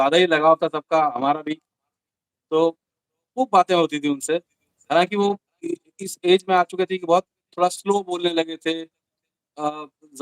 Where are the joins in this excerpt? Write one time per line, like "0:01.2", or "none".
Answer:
none